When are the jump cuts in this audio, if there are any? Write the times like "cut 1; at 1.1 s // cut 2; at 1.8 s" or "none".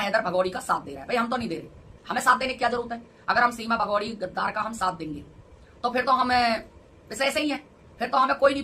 none